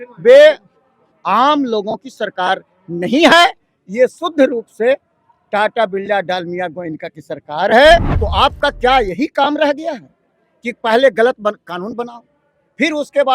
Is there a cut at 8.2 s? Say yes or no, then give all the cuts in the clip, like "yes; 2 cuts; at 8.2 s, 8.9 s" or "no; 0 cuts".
yes; 1 cut; at 8.2 s